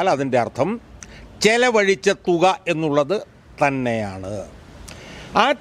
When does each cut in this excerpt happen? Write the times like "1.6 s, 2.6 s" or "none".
none